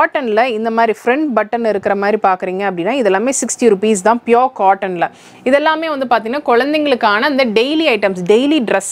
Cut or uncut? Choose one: uncut